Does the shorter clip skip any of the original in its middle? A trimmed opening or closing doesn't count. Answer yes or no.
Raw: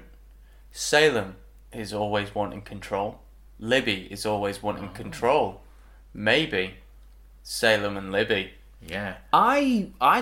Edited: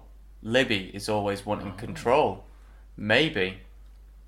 no